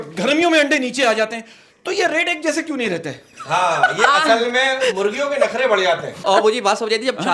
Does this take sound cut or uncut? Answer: cut